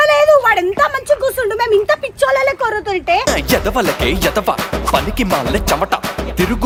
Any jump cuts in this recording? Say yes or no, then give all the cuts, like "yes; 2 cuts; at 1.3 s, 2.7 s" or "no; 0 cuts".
no; 0 cuts